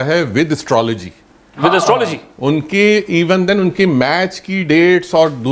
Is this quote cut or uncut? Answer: uncut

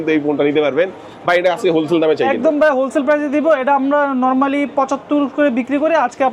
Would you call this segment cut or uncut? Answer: uncut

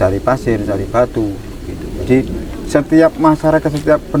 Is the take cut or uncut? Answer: uncut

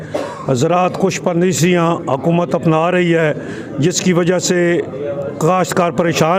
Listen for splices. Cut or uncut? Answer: uncut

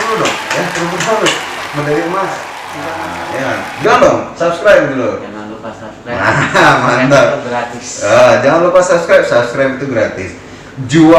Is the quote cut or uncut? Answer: cut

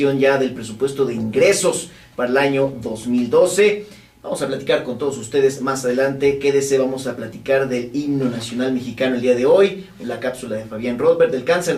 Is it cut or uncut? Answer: uncut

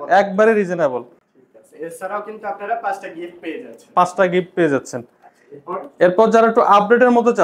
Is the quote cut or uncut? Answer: uncut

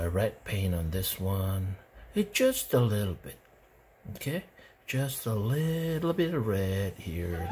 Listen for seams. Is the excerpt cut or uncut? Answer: uncut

